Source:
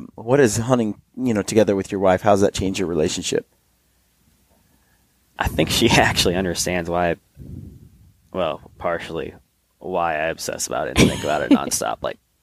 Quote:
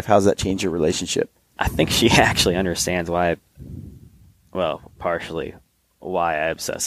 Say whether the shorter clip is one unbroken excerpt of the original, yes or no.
no